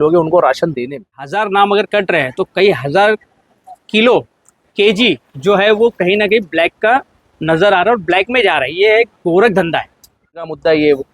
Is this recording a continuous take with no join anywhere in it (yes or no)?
no